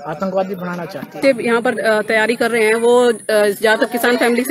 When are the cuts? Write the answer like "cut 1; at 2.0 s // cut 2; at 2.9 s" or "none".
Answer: cut 1; at 1.2 s

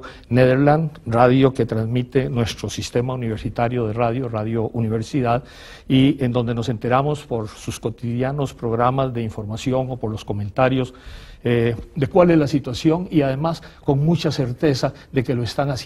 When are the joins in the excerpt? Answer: cut 1; at 3.3 s

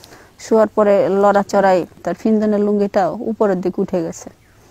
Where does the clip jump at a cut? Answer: cut 1; at 2.0 s

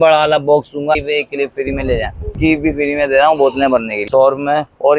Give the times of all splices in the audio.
cut 1; at 1.0 s // cut 2; at 2.3 s // cut 3; at 4.0 s

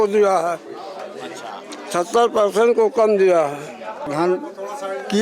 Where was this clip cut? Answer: cut 1; at 4.1 s

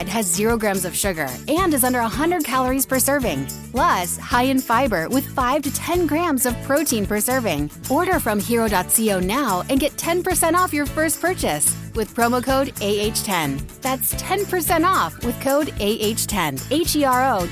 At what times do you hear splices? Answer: cut 1; at 3.6 s // cut 2; at 7.8 s // cut 3; at 16.6 s

